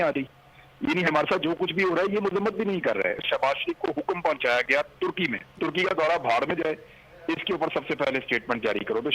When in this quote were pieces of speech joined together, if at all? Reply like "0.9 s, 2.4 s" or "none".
3.2 s, 5.5 s